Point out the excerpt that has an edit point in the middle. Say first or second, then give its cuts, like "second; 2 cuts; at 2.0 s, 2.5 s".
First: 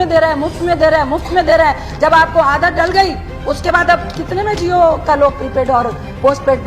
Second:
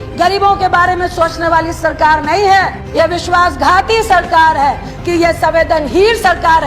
second; 2 cuts; at 2.8 s, 4.9 s